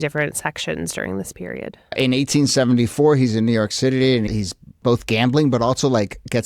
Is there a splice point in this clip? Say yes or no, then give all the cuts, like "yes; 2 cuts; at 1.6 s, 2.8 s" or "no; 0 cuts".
yes; 2 cuts; at 1.9 s, 4.3 s